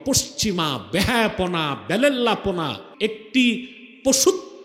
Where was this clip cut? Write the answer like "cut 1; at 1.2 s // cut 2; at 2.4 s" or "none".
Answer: cut 1; at 2.8 s